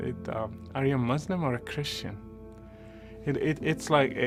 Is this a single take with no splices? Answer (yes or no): yes